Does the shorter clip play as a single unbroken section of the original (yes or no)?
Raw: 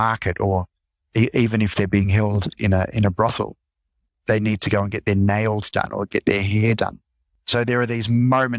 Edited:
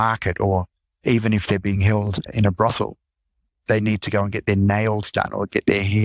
no